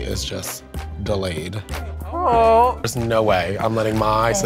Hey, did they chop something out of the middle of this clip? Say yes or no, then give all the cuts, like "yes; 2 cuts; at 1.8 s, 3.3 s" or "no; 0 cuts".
no; 0 cuts